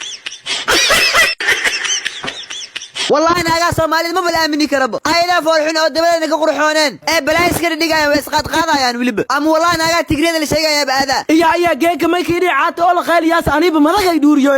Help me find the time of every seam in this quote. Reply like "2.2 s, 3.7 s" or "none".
3.1 s